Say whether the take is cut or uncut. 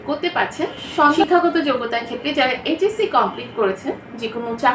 cut